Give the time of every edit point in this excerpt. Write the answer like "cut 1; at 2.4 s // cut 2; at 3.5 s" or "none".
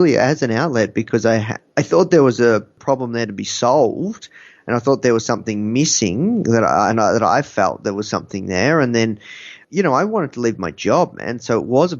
cut 1; at 1.6 s // cut 2; at 2.8 s // cut 3; at 9.6 s